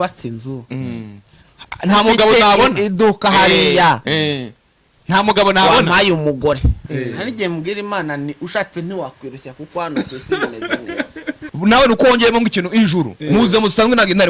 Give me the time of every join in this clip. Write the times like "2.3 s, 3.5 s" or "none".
6.8 s, 11.4 s